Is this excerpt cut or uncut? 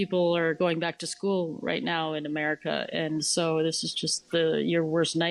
uncut